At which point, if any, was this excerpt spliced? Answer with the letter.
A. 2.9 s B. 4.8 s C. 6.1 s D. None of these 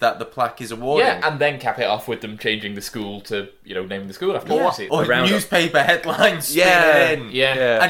B